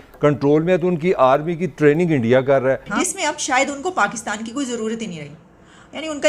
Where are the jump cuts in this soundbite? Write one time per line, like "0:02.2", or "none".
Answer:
0:02.9